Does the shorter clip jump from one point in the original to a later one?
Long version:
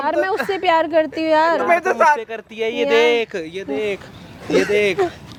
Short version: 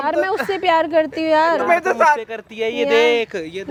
no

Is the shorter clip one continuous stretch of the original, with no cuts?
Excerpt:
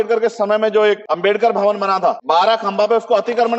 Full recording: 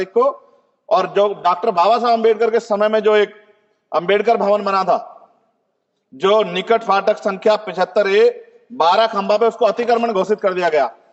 no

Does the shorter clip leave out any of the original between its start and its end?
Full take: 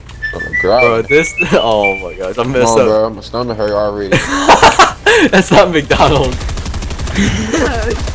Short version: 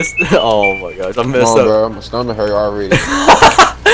no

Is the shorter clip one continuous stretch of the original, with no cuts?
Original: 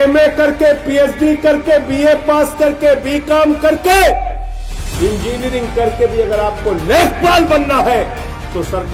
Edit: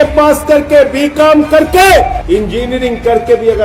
no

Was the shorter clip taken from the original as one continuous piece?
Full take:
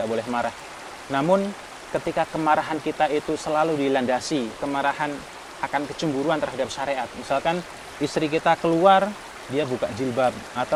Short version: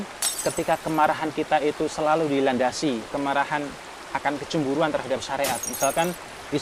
yes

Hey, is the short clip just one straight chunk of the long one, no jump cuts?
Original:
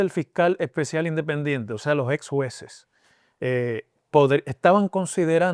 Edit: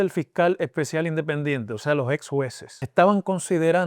no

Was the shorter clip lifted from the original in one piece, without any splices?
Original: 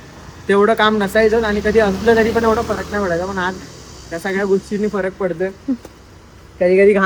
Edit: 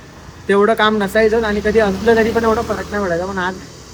yes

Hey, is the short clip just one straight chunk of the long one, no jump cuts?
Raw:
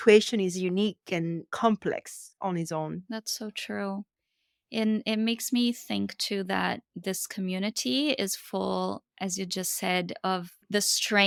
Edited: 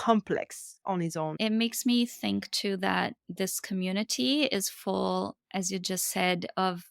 no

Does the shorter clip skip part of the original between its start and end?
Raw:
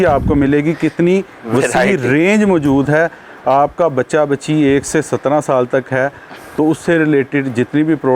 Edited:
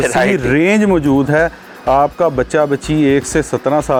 no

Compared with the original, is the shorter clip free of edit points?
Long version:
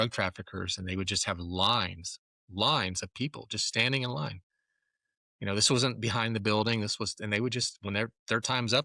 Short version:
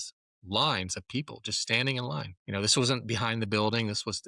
no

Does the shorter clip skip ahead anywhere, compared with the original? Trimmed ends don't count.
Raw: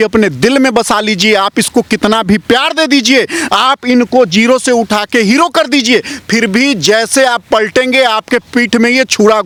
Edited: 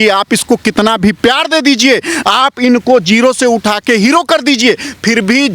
no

